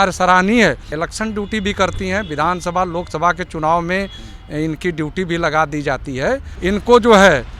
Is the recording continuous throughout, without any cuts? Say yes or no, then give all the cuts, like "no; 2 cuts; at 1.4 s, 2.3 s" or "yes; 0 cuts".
no; 2 cuts; at 1.0 s, 6.5 s